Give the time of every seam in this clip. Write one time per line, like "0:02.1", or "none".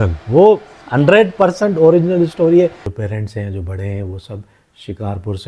0:02.9